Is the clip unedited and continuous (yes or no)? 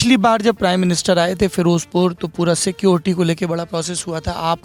yes